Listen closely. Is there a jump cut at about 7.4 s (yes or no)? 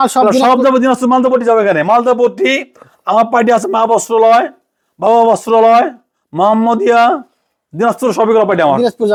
no